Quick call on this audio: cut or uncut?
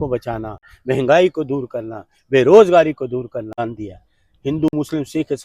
cut